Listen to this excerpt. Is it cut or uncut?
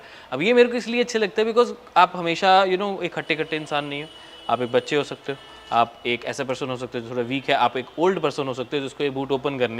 uncut